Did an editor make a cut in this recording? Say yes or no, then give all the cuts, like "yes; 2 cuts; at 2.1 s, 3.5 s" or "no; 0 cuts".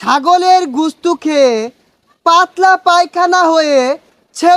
no; 0 cuts